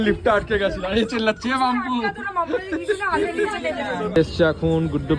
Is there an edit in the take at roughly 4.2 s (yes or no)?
yes